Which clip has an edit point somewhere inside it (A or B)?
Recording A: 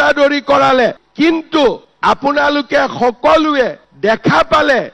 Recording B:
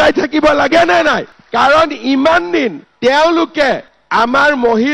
A